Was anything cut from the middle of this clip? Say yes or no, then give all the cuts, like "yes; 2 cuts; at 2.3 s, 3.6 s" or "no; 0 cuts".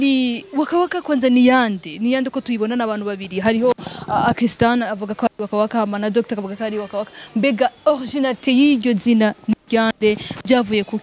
no; 0 cuts